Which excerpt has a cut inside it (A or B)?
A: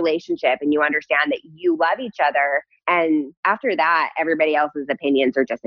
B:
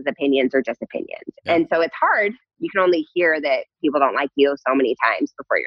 A